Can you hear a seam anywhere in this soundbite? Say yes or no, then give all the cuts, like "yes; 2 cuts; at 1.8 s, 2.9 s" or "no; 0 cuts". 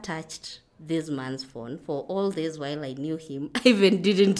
no; 0 cuts